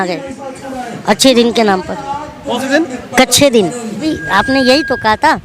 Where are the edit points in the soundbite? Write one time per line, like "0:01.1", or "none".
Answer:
0:04.0